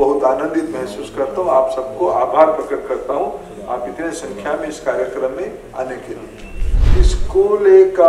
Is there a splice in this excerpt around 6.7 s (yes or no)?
yes